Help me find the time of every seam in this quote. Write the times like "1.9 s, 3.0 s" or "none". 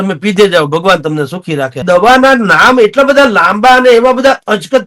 1.8 s